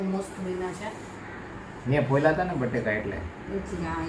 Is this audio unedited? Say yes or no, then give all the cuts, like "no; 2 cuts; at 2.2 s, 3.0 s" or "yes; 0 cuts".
yes; 0 cuts